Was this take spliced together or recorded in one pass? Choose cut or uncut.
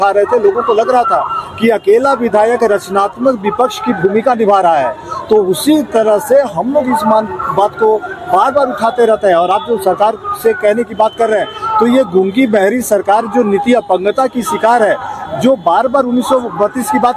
uncut